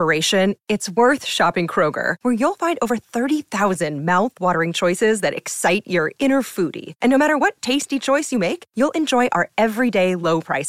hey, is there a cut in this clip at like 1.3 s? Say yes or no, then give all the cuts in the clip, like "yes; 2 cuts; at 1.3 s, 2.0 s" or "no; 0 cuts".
no; 0 cuts